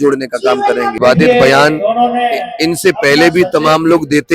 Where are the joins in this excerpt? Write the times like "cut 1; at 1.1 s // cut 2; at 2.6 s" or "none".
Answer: cut 1; at 1.0 s